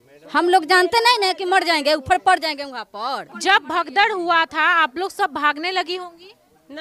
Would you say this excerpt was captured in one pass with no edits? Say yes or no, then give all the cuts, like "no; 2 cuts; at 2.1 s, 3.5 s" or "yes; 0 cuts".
no; 1 cut; at 3.3 s